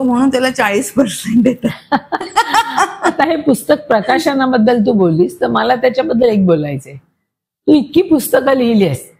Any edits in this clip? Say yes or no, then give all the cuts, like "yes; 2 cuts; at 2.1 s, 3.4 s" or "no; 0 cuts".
no; 0 cuts